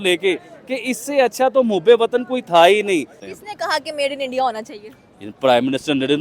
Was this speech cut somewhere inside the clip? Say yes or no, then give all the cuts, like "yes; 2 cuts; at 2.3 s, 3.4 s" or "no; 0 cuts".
yes; 1 cut; at 3.2 s